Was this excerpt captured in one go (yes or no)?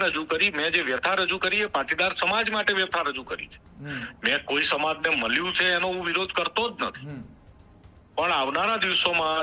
yes